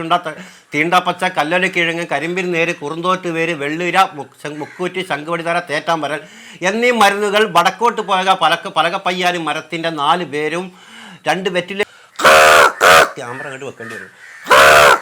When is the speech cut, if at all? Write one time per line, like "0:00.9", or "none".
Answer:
0:11.8